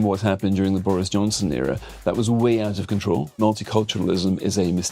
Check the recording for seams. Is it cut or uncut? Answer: cut